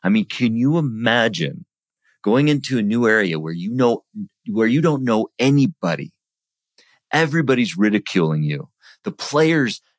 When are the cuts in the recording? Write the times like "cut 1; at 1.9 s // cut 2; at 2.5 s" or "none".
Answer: none